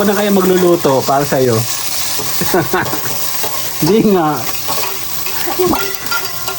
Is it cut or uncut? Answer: uncut